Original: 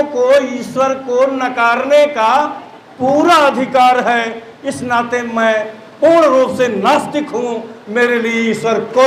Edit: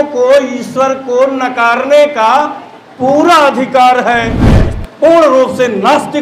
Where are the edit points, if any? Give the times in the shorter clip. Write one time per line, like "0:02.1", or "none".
0:04.7